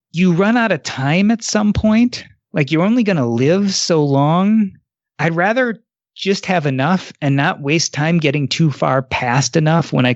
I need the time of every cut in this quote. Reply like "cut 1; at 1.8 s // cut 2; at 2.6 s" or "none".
none